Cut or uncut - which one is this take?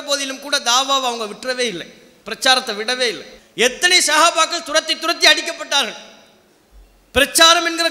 cut